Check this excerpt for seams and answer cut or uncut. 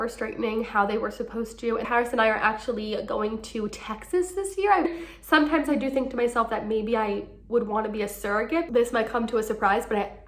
cut